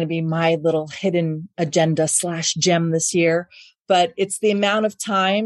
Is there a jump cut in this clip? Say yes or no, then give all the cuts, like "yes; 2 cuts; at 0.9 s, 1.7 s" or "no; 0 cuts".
no; 0 cuts